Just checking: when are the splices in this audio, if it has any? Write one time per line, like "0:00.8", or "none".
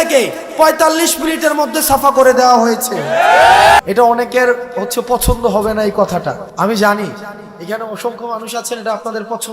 0:03.8
0:06.5